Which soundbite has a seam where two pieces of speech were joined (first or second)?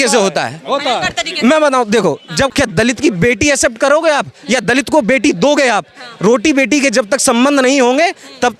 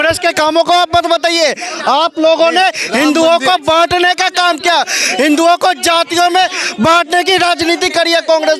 first